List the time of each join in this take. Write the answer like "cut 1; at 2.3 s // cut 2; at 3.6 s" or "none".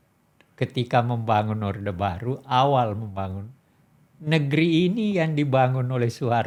none